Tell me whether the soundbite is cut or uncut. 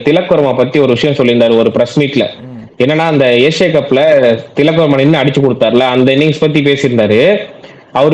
uncut